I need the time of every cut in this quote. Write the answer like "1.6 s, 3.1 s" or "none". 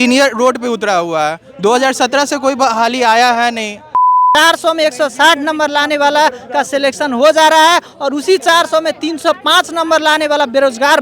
4.3 s